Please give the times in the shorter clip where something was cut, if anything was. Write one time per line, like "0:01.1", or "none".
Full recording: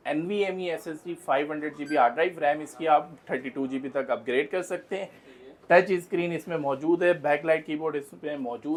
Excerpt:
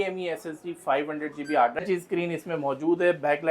0:01.8